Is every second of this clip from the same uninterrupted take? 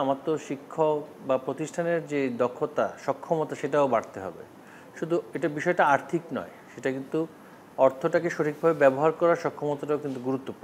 yes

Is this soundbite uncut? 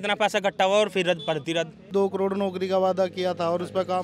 no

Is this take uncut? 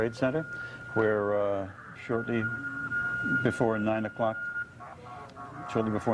yes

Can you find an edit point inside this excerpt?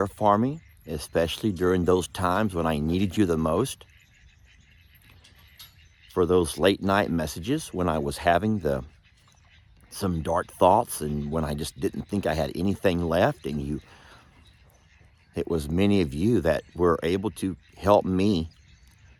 no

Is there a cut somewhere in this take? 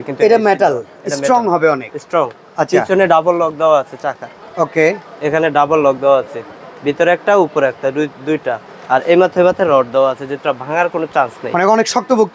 no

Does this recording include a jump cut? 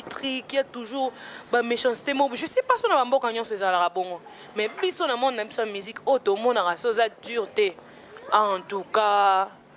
no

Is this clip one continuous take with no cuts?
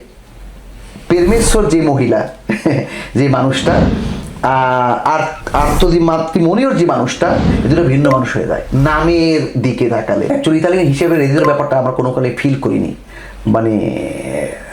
no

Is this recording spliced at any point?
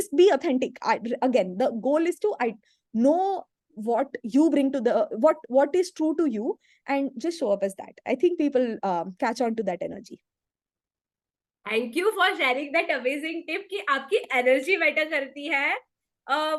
no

